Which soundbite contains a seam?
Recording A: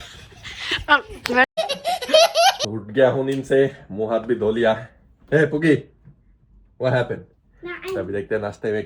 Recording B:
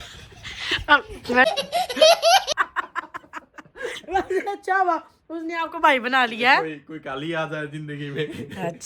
B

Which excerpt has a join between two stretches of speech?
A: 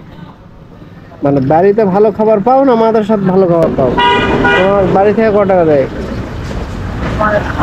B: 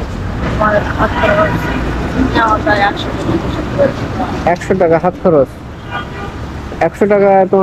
A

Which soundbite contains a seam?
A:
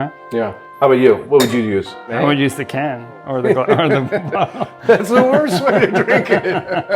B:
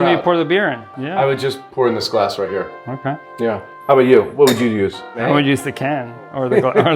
B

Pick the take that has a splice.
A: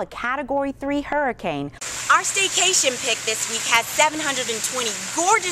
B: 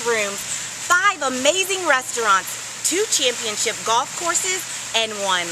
A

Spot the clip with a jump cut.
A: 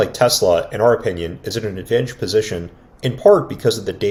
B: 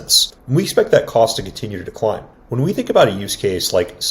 B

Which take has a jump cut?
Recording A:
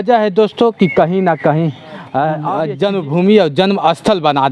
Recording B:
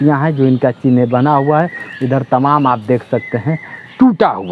A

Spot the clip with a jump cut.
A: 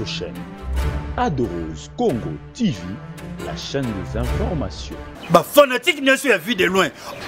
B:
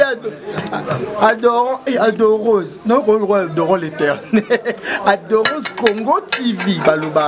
A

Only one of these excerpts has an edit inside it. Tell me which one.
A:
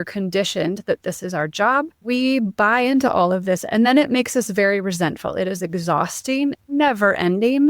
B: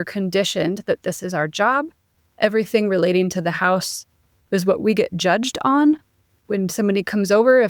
A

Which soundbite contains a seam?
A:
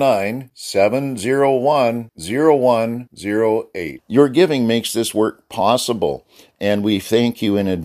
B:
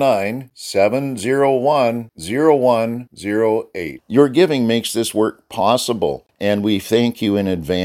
B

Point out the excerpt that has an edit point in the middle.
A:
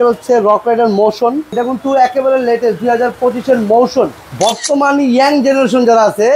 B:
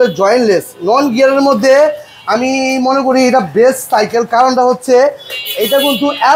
A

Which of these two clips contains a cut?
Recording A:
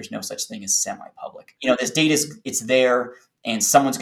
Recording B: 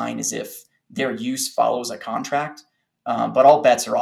A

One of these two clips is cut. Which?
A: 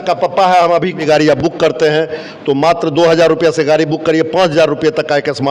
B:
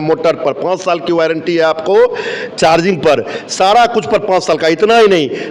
A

